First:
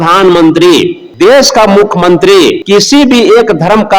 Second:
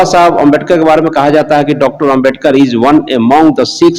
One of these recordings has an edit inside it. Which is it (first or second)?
first